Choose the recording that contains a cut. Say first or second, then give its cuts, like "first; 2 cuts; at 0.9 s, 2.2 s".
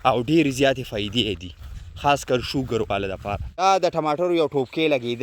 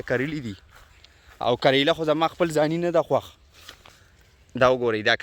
first; 1 cut; at 3.6 s